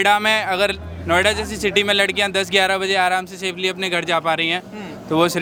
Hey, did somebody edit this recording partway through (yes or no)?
no